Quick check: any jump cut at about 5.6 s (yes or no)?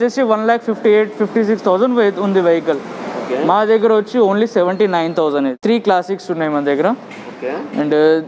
yes